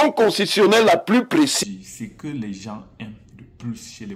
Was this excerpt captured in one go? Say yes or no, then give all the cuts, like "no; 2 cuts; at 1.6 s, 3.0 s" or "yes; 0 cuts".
no; 1 cut; at 1.5 s